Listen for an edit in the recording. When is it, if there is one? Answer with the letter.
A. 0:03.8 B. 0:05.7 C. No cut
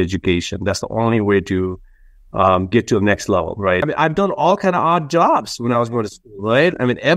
A